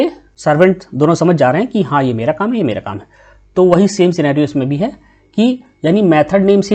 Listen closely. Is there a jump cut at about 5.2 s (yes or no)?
no